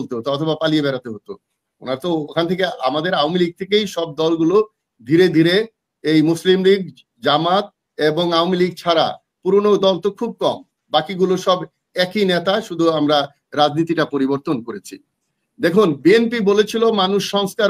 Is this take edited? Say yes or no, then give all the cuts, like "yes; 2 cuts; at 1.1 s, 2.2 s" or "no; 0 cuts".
no; 0 cuts